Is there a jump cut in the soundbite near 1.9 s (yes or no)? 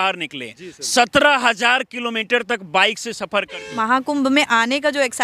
no